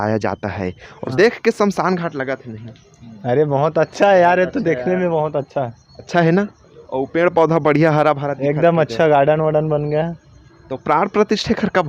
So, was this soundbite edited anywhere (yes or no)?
yes